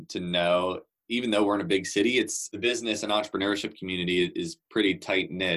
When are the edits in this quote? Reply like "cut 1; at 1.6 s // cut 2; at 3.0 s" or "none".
cut 1; at 2.4 s